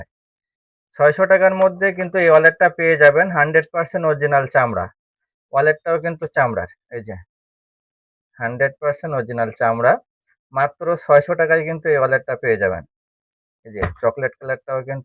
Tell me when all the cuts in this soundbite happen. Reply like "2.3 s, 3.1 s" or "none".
none